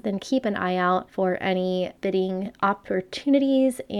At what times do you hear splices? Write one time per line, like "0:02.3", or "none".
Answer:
0:01.1
0:01.9